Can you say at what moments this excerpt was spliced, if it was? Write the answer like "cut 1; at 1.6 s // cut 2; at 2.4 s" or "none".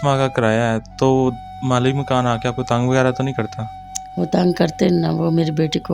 none